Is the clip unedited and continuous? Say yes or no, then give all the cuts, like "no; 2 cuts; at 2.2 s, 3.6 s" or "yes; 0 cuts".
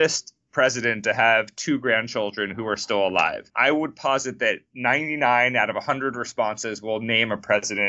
no; 1 cut; at 3.5 s